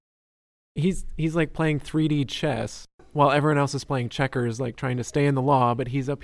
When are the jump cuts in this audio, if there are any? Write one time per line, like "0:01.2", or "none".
0:03.0